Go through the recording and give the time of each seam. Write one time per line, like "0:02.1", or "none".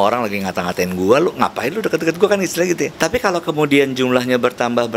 0:02.9